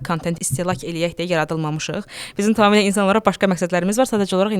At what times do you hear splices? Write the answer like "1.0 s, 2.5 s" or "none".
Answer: none